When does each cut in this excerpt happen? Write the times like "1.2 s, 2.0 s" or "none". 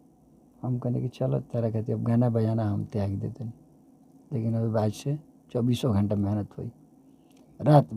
none